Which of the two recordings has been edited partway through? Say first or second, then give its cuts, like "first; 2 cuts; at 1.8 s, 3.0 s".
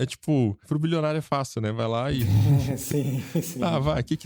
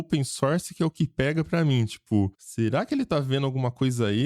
second; 1 cut; at 2.4 s